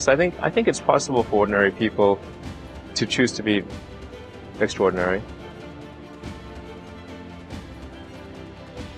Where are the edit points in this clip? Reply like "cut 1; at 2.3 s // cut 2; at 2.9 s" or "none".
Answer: cut 1; at 5.2 s